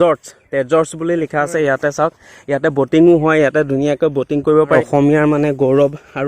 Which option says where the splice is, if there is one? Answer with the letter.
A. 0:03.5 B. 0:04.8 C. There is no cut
B